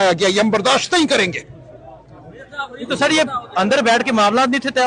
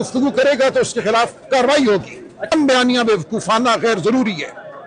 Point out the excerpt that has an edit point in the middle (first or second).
second